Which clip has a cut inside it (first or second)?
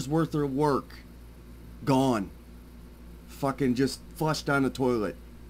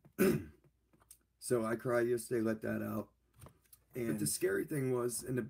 second